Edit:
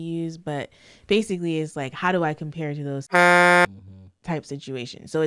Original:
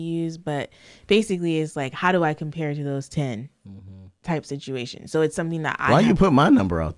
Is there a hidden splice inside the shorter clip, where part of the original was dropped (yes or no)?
no